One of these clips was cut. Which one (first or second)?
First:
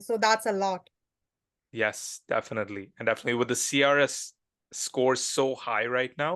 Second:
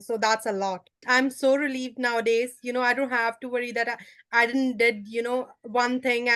second